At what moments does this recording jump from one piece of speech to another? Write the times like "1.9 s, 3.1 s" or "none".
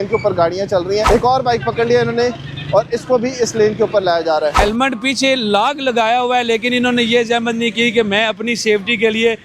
1.0 s, 4.6 s